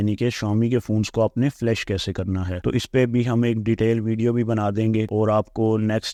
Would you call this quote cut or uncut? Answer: uncut